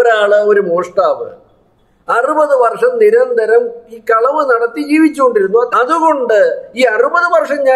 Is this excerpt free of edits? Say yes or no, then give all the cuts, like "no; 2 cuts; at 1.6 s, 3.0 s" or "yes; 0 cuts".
no; 1 cut; at 5.7 s